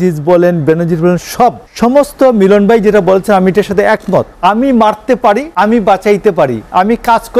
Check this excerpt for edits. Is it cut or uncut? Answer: cut